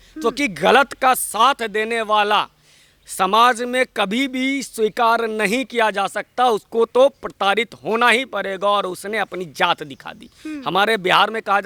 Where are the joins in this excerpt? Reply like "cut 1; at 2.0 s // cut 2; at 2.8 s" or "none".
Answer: none